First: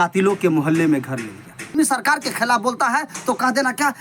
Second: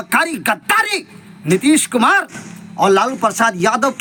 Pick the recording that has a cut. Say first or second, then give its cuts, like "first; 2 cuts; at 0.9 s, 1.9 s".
first; 1 cut; at 1.7 s